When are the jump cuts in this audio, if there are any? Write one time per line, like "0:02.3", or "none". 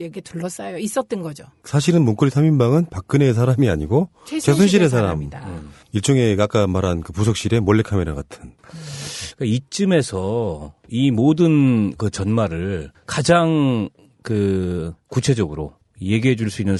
none